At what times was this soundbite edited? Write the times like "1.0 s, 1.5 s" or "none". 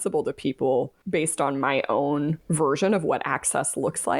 1.0 s, 2.4 s